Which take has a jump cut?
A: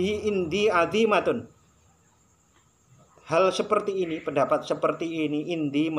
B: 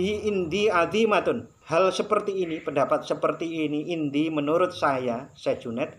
B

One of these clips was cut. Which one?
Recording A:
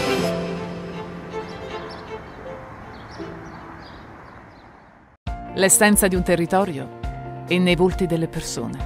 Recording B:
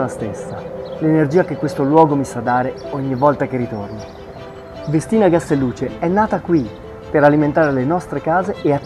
A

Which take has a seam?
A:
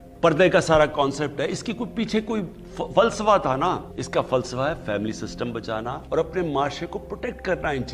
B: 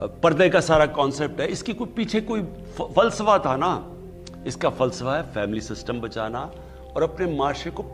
A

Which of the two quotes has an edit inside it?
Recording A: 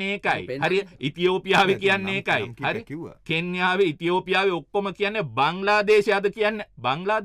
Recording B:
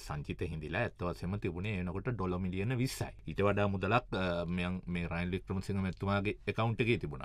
B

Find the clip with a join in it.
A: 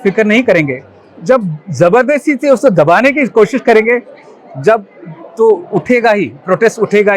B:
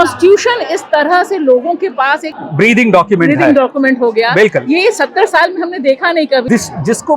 B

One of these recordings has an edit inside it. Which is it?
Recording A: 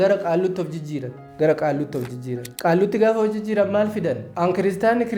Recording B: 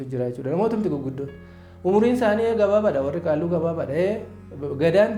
A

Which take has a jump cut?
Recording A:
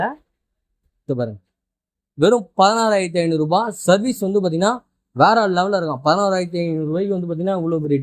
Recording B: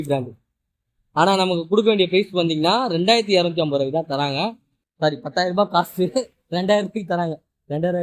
B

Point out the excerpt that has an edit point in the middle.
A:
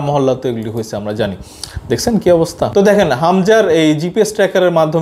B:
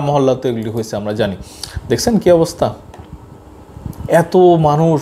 A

